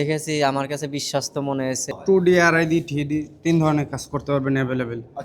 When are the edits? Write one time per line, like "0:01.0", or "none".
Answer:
0:01.9